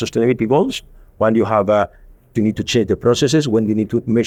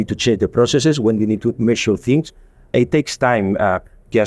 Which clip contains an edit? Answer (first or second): second